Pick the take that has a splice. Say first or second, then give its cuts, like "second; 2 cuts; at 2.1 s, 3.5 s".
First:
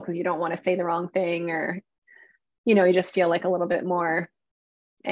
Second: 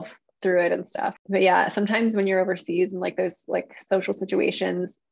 second; 1 cut; at 1.2 s